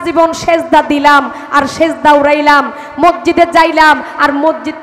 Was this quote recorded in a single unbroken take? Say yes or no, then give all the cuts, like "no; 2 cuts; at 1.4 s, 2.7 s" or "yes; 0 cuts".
yes; 0 cuts